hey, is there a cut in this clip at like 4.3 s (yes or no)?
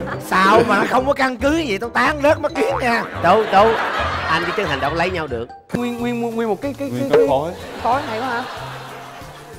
no